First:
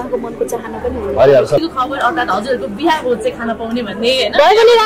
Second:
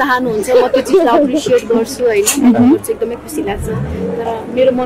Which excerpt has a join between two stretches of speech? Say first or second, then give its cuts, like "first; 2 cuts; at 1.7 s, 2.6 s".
first; 1 cut; at 1.6 s